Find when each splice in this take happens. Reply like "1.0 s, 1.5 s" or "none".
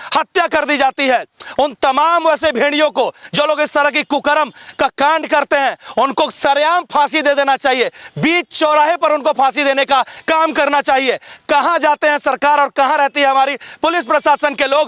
none